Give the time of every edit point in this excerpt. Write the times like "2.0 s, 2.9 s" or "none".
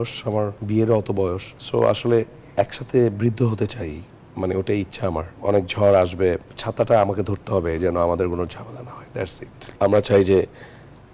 9.7 s